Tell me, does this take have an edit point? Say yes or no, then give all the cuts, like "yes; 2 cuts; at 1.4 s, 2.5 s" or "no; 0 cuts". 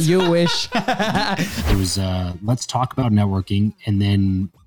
yes; 1 cut; at 1.6 s